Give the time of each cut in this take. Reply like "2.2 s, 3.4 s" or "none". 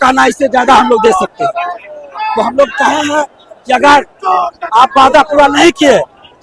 none

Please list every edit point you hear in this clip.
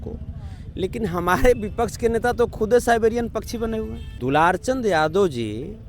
4.0 s

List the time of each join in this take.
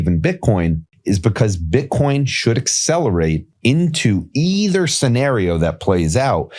0.9 s, 3.5 s

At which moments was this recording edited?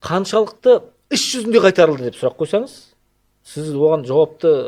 none

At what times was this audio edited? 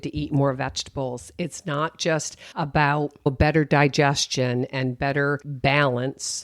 2.4 s, 3.3 s, 5.5 s

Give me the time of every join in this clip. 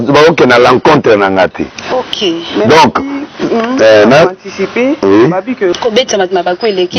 5.7 s

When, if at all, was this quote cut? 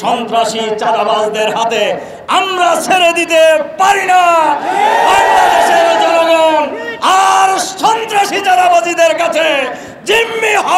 none

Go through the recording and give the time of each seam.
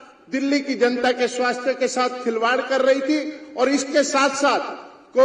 none

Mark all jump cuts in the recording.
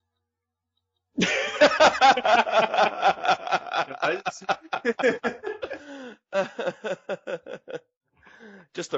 7.8 s

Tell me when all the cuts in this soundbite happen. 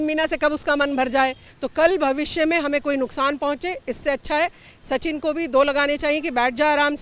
1.5 s

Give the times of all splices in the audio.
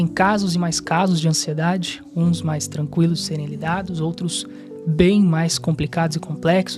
none

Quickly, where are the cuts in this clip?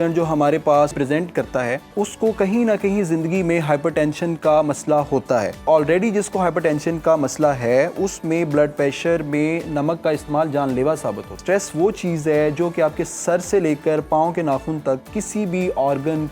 0.9 s, 1.9 s, 5.6 s, 11.4 s

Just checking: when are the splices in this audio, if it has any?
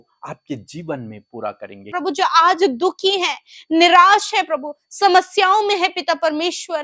1.9 s

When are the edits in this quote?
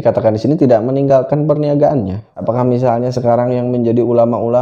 2.3 s

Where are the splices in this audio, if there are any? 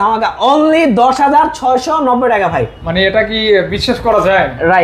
none

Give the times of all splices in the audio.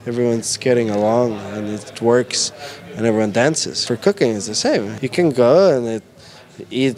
3.7 s, 5.0 s

